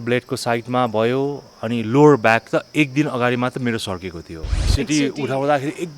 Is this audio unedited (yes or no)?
no